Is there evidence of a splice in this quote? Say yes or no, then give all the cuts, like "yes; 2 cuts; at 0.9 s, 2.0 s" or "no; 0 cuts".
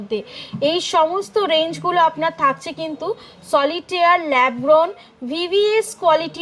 no; 0 cuts